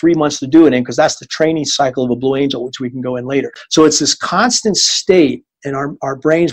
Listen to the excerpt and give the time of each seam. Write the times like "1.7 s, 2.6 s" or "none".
3.6 s